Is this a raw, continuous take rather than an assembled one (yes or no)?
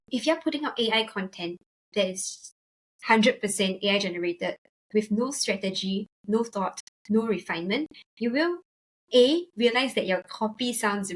yes